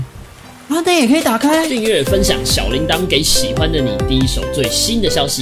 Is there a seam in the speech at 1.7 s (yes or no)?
yes